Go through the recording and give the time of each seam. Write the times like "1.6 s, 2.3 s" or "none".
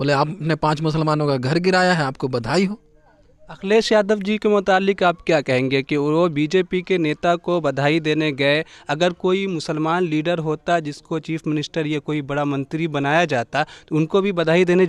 none